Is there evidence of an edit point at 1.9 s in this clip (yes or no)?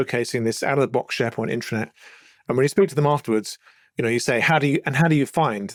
no